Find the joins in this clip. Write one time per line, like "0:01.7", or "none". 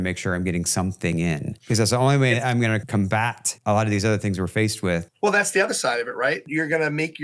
0:01.5
0:02.9
0:05.1
0:06.5